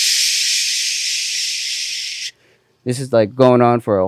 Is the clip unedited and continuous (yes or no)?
yes